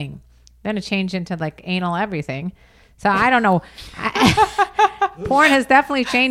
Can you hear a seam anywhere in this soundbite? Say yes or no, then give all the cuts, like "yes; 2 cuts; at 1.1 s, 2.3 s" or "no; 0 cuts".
no; 0 cuts